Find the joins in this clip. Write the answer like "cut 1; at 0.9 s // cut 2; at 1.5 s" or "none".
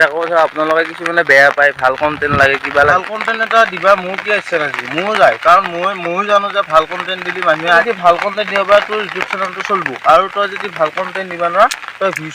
cut 1; at 2.9 s // cut 2; at 7.8 s